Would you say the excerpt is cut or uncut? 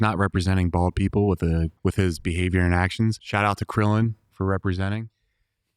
cut